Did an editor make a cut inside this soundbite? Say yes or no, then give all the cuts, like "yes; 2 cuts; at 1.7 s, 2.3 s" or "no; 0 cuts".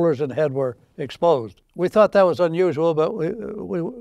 no; 0 cuts